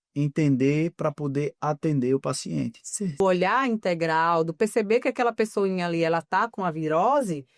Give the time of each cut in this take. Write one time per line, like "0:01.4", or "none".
0:03.2